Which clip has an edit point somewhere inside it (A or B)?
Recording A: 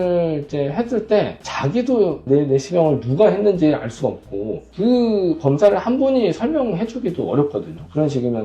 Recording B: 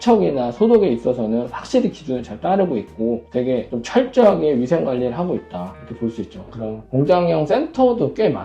B